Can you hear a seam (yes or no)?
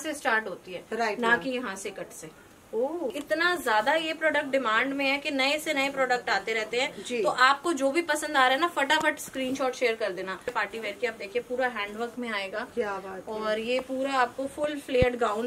yes